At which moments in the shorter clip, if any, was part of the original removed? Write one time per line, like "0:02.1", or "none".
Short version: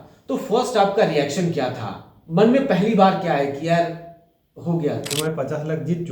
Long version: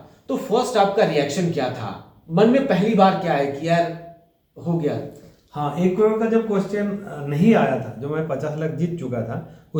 0:05.1